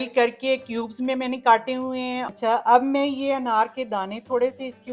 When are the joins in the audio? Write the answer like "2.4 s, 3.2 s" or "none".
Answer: 2.3 s